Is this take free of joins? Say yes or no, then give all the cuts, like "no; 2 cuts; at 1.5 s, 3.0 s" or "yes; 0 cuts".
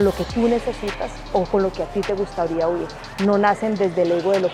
yes; 0 cuts